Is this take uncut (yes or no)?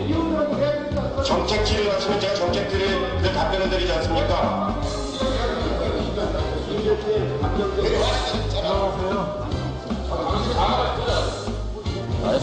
yes